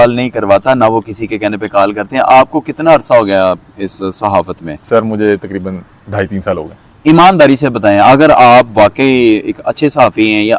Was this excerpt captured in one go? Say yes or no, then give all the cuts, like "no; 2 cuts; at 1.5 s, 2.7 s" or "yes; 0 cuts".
yes; 0 cuts